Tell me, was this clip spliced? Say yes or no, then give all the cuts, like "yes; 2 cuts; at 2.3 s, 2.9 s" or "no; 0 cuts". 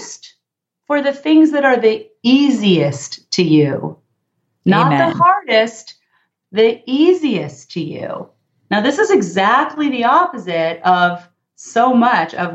no; 0 cuts